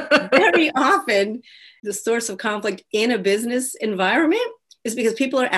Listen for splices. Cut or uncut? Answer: cut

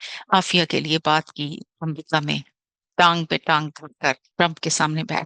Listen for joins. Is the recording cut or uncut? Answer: cut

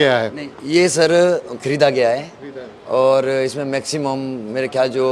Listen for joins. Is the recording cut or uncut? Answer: uncut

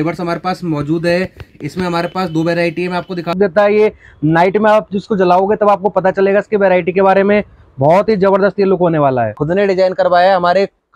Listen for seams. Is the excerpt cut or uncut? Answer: cut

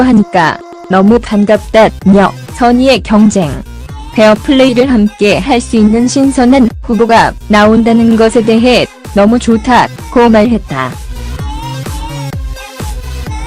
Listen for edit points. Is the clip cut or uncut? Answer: cut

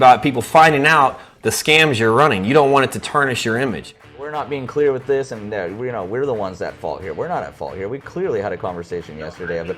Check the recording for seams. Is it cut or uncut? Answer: cut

